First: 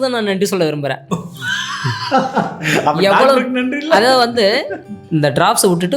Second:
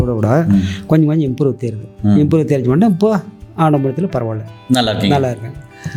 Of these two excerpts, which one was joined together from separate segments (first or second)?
first